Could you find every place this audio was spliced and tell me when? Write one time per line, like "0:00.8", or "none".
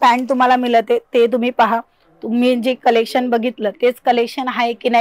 none